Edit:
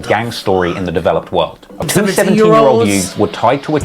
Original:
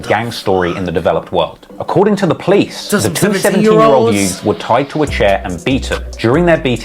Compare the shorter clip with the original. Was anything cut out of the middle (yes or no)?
yes